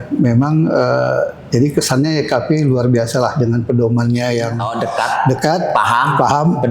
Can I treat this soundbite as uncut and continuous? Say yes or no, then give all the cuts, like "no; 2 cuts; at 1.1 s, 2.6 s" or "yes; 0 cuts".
no; 1 cut; at 4.7 s